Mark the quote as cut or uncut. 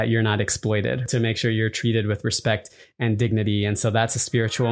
cut